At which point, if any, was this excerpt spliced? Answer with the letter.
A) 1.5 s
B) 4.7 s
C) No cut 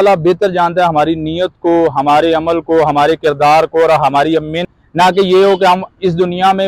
B